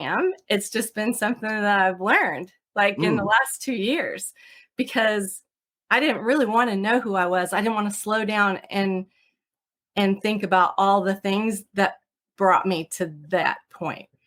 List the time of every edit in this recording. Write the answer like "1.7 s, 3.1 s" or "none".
none